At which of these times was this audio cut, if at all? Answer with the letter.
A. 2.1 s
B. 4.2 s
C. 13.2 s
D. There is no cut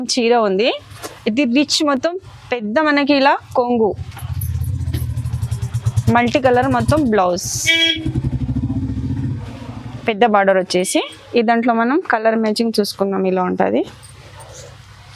D